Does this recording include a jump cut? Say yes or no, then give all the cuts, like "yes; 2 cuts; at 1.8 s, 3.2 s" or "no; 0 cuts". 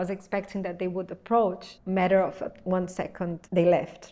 yes; 1 cut; at 1.7 s